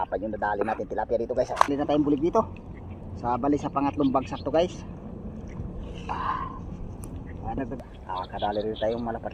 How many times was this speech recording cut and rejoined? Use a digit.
2